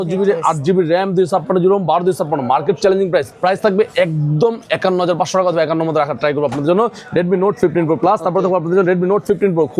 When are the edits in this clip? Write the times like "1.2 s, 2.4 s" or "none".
none